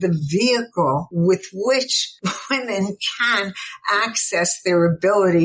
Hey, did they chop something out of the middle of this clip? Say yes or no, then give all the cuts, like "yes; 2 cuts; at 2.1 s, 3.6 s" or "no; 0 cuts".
yes; 2 cuts; at 1.1 s, 2.0 s